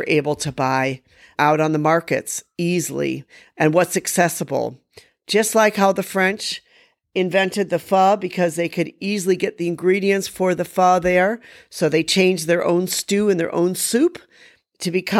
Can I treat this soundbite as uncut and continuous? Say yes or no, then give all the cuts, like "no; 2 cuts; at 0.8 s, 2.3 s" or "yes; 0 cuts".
yes; 0 cuts